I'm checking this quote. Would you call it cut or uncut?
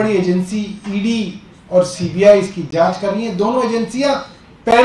uncut